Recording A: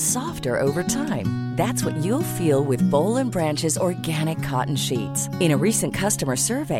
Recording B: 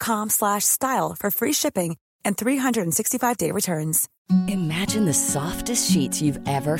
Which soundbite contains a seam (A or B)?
B